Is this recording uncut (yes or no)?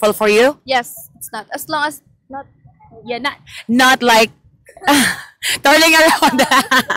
yes